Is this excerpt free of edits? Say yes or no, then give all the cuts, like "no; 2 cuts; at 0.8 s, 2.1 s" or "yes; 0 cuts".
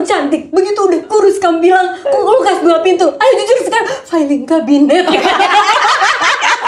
yes; 0 cuts